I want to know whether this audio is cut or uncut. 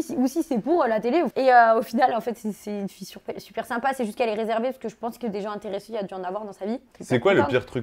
cut